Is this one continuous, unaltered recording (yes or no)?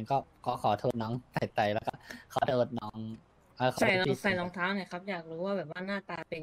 yes